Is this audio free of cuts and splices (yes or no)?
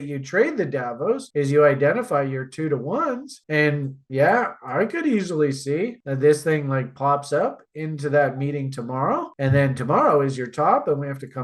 yes